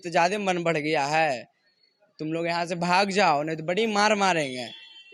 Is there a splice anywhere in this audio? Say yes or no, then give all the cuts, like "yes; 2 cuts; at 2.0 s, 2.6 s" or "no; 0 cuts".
no; 0 cuts